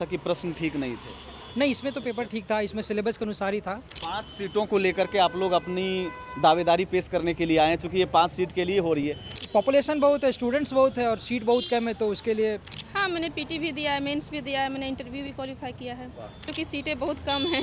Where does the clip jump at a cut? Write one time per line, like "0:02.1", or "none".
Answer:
0:03.9
0:09.2
0:12.8
0:16.5